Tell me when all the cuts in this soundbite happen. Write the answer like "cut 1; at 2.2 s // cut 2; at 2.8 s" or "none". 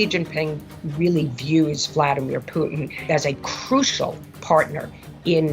cut 1; at 3.0 s